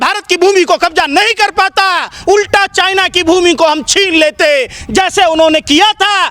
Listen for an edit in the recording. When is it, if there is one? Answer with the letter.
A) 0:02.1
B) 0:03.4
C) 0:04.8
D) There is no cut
D